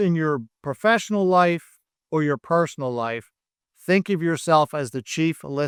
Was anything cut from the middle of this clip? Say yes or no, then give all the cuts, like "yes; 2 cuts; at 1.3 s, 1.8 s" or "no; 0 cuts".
no; 0 cuts